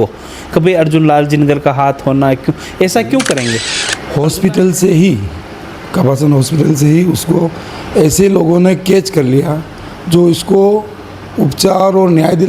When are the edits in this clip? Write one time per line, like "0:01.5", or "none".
0:03.6